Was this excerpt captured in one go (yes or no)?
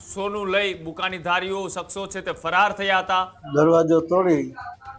no